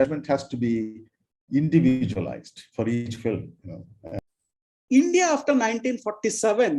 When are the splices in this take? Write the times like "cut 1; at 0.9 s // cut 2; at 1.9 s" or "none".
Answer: cut 1; at 4.2 s